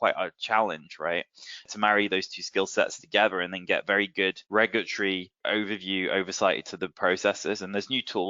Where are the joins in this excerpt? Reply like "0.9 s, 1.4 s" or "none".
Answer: 1.7 s, 4.4 s, 5.4 s

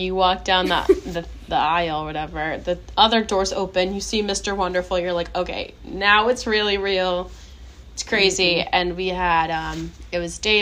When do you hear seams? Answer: none

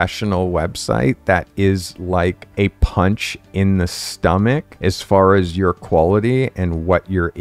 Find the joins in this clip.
2.4 s, 4.7 s

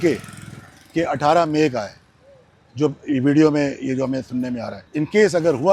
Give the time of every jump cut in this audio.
4.8 s

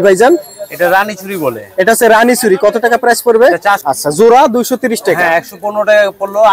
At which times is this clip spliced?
3.8 s

